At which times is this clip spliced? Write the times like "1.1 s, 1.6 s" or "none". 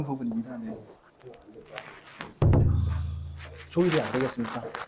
1.0 s